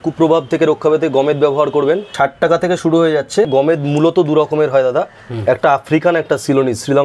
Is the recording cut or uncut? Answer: cut